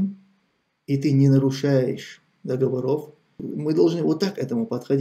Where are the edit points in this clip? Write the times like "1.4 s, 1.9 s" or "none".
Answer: 3.3 s